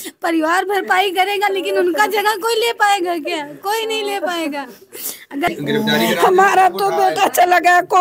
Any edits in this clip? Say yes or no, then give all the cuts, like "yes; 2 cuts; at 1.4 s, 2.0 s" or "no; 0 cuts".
yes; 1 cut; at 5.5 s